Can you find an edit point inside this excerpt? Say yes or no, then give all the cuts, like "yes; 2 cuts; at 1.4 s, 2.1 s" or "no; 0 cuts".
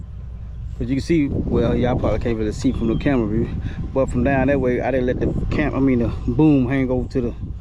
no; 0 cuts